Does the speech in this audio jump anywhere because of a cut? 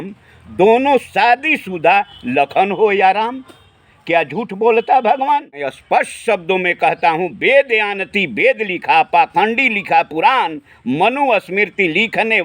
yes; 1 cut; at 5.8 s

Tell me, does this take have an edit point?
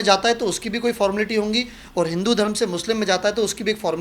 no; 0 cuts

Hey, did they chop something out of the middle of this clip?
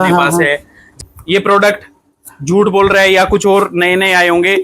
yes; 1 cut; at 0.9 s

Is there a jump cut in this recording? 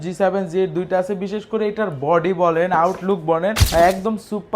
yes; 1 cut; at 3.6 s

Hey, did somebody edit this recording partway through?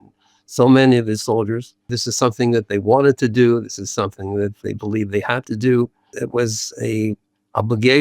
yes; 2 cuts; at 2.0 s, 6.2 s

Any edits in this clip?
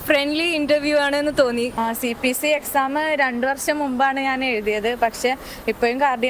yes; 1 cut; at 1.8 s

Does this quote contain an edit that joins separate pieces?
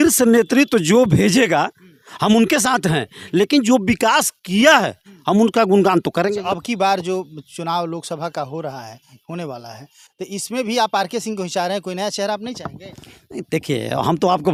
no; 0 cuts

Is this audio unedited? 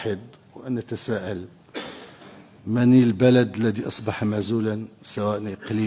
yes; 0 cuts

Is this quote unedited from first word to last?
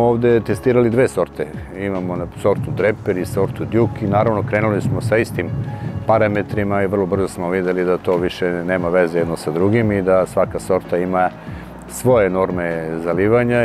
yes; 0 cuts

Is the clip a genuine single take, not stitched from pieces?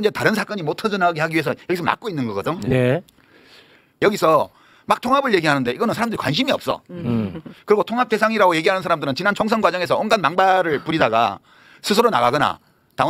no; 1 cut; at 3.9 s

